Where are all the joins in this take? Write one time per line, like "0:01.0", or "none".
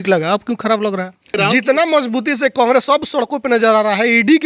0:01.4